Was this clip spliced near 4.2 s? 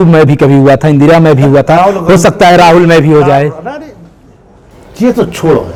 no; 0 cuts

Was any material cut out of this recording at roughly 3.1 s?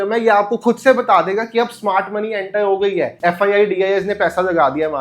yes; 1 cut; at 3.1 s

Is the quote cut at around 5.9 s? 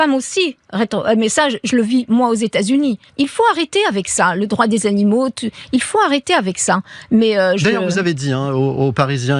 no; 1 cut; at 3.1 s

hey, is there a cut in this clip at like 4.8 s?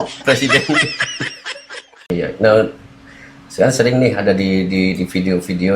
no; 1 cut; at 2.1 s

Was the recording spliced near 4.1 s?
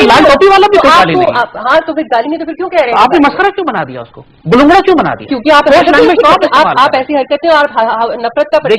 no; 0 cuts

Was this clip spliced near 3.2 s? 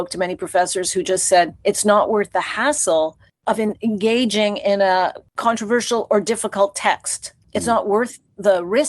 no; 2 cuts; at 1.6 s, 5.3 s

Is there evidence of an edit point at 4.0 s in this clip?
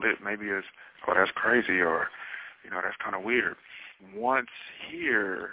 yes; 1 cut; at 4.0 s

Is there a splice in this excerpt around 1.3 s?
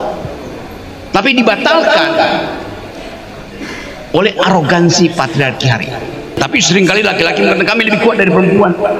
no; 1 cut; at 6.3 s

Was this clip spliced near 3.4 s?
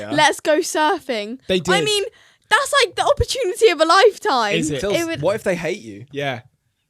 no; 1 cut; at 4.8 s

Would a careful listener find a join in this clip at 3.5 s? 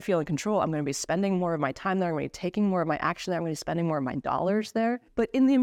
no; 0 cuts

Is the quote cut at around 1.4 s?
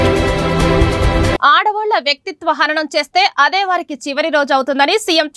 yes; 1 cut; at 1.4 s

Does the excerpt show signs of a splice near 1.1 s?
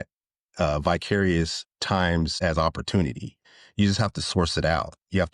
no; 2 cuts; at 2.4 s, 3.4 s

